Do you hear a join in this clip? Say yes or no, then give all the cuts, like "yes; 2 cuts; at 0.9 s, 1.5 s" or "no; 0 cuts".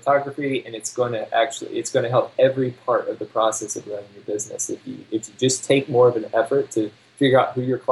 no; 0 cuts